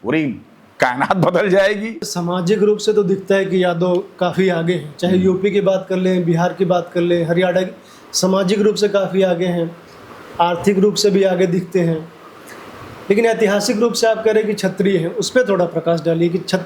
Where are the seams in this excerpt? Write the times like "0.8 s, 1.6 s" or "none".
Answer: 2.1 s